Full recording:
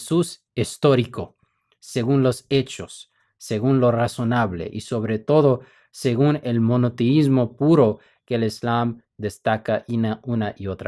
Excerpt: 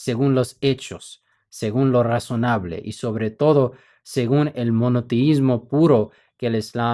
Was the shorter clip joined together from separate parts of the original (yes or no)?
no